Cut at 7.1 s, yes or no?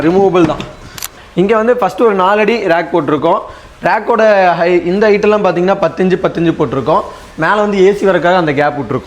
no